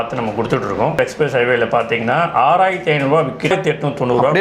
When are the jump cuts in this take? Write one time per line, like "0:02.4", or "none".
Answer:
0:00.9
0:03.5